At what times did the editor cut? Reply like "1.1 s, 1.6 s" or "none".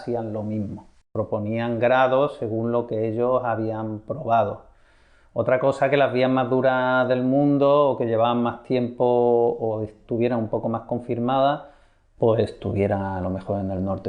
1.0 s